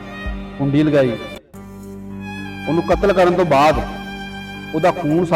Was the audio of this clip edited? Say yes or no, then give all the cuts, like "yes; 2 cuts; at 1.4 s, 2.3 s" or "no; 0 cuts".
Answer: yes; 2 cuts; at 1.2 s, 2.6 s